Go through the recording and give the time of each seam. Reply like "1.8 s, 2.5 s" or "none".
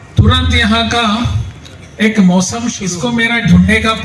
2.8 s

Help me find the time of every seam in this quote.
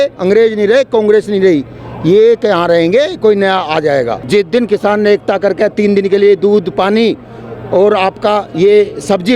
4.2 s

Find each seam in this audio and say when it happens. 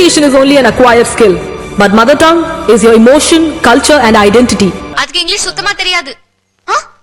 none

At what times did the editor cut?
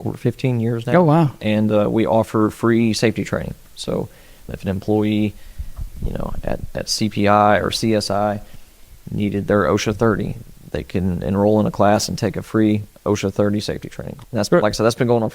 4.5 s, 14.1 s

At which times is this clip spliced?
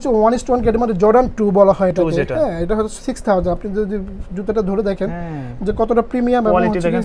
none

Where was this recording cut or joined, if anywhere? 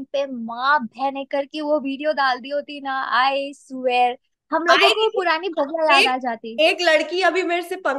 none

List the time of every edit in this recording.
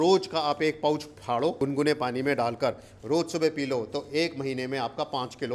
1.6 s

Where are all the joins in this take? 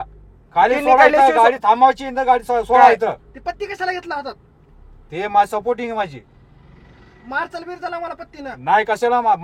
none

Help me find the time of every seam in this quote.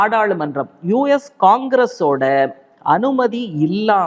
none

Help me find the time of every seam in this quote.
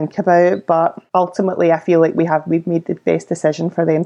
1.0 s

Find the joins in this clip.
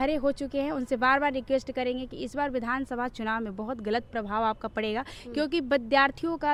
none

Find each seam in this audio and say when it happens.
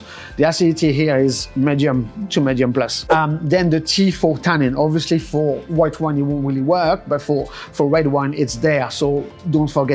3.0 s

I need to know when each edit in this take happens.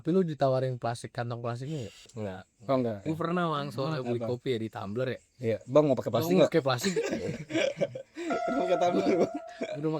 2.0 s, 3.0 s

